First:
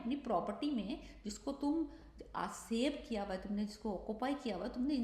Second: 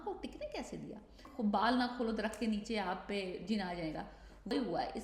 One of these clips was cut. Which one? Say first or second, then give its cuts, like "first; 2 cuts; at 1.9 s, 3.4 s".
second; 1 cut; at 1.3 s